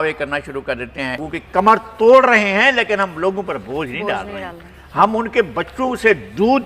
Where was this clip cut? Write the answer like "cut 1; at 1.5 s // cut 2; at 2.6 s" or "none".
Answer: cut 1; at 1.2 s